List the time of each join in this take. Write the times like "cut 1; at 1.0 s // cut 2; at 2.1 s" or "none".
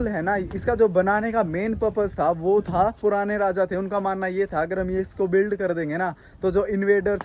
cut 1; at 3.0 s

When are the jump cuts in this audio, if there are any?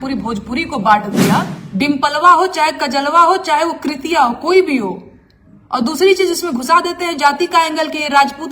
cut 1; at 1.6 s

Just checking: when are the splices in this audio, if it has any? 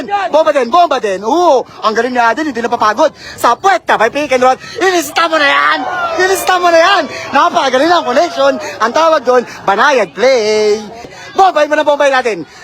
cut 1; at 11.1 s

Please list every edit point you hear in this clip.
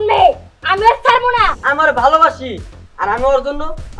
cut 1; at 1.6 s

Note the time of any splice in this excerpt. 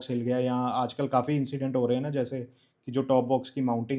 none

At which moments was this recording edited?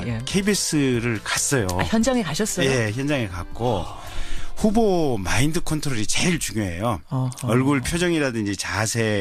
cut 1; at 7.8 s

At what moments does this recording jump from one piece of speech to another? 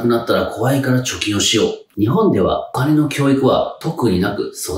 cut 1; at 1.9 s

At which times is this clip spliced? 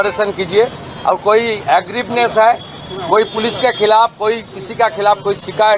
none

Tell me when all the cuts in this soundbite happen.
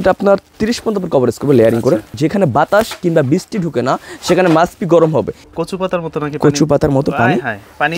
cut 1; at 2.1 s // cut 2; at 5.4 s

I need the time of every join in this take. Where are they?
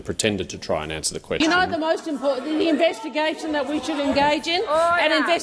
cut 1; at 1.4 s

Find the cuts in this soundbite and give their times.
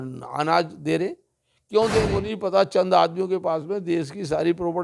cut 1; at 2.1 s

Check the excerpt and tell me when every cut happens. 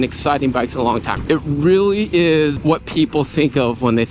cut 1; at 1.1 s // cut 2; at 2.6 s

